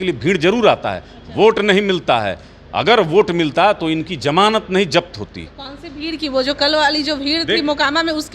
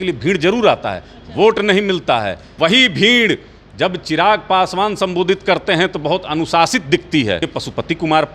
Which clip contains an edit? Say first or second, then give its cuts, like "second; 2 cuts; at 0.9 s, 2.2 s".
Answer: second; 2 cuts; at 2.5 s, 7.5 s